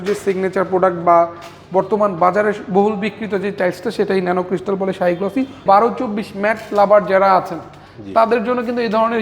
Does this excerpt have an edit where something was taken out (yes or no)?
yes